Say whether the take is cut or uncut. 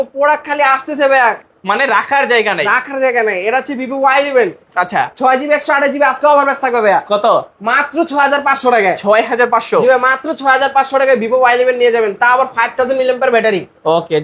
uncut